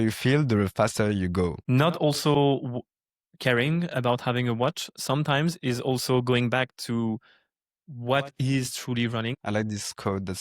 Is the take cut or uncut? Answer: cut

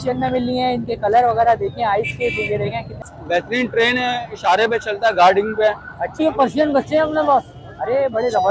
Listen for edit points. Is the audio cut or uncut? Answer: cut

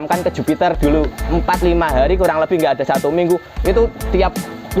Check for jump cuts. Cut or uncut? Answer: cut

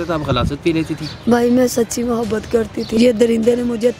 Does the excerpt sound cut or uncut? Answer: cut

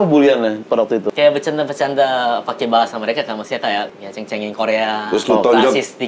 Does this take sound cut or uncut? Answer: cut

